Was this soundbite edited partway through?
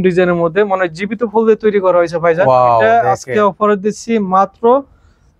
no; 0 cuts

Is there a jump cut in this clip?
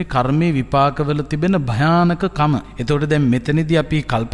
yes; 1 cut; at 2.7 s

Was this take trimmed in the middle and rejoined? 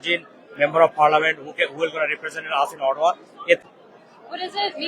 yes; 1 cut; at 3.6 s

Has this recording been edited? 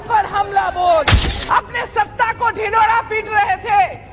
yes; 1 cut; at 1.3 s

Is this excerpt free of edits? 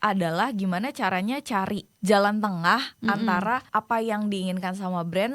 no; 2 cuts; at 1.9 s, 3.6 s

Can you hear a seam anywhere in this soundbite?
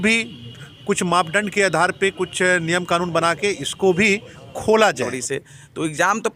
yes; 1 cut; at 5.2 s

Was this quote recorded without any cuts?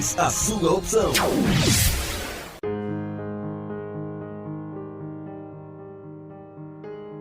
no; 1 cut; at 2.5 s

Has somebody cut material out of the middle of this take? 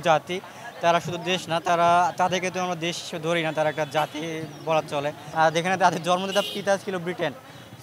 yes; 1 cut; at 5.2 s

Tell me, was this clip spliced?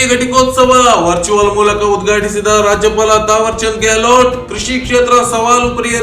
no; 0 cuts

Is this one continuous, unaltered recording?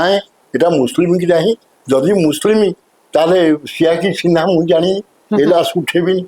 yes; 0 cuts

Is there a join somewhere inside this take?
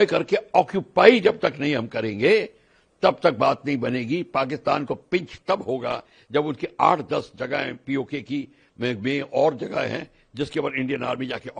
no; 0 cuts

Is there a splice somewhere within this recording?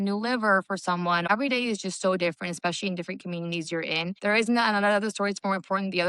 yes; 2 cuts; at 1.2 s, 4.2 s

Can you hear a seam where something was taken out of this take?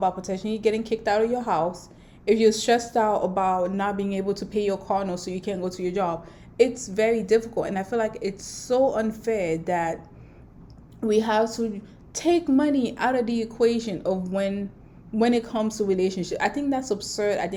no; 0 cuts

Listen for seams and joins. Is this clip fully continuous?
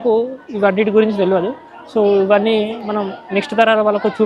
yes; 0 cuts

